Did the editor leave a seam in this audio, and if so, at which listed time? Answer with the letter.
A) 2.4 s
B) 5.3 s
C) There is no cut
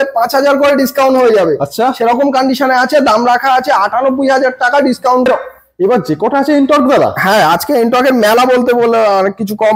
B